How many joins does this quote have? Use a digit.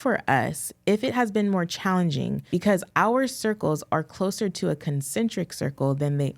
1